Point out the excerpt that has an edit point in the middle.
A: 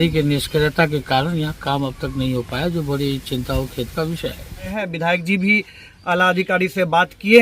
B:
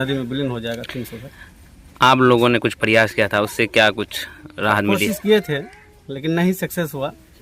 A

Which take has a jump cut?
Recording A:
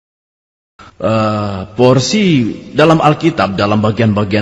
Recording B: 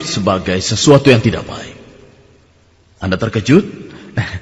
A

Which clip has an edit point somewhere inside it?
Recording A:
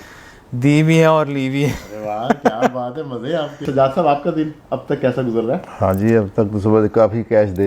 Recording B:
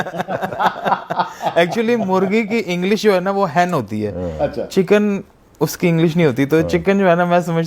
A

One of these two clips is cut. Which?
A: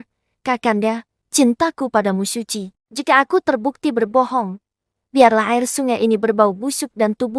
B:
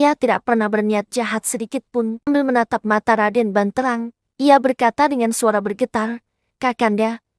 B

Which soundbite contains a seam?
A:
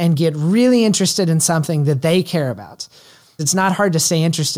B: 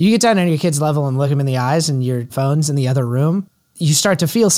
B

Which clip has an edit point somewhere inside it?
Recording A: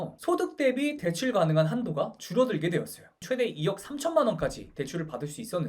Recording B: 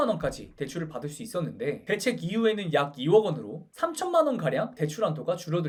A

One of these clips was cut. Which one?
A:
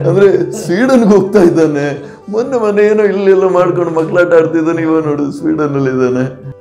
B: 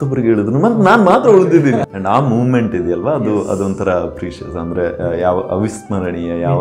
B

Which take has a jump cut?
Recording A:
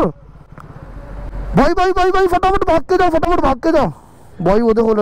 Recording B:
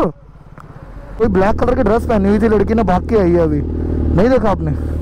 B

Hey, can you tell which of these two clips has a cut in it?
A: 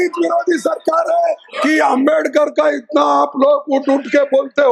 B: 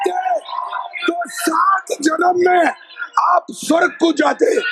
A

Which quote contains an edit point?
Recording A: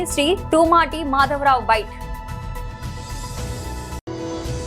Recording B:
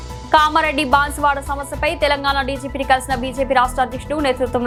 A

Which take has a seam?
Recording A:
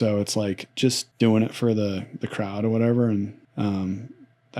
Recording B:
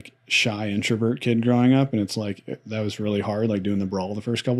A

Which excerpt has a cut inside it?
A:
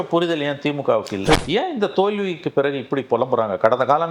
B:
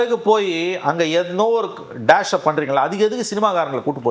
A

